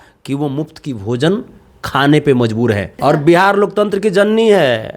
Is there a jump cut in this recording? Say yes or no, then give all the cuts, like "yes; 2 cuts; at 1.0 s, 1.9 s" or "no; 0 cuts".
yes; 1 cut; at 2.9 s